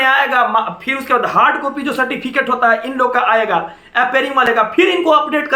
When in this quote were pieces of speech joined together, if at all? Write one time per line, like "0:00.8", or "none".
none